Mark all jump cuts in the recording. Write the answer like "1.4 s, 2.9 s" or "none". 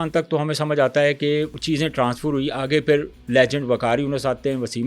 1.6 s